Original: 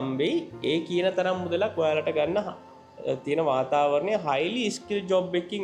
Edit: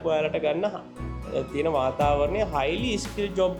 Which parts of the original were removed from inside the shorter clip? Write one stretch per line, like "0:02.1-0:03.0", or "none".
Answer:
none